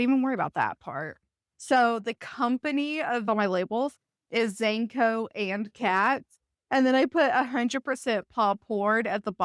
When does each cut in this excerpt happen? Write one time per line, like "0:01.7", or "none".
0:01.4
0:03.2